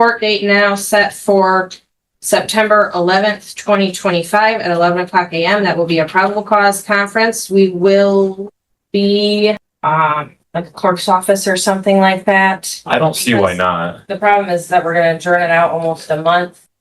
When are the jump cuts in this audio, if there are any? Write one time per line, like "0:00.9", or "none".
0:09.7